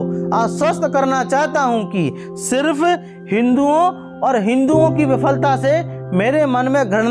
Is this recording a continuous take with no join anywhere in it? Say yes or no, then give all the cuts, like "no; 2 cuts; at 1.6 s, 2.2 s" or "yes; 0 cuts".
yes; 0 cuts